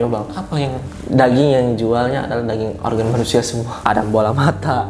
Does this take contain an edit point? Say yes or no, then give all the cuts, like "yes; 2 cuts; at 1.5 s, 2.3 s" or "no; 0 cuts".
yes; 1 cut; at 3.7 s